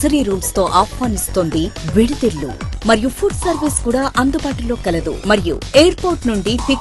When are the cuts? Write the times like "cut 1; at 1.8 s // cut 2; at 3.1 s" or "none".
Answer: none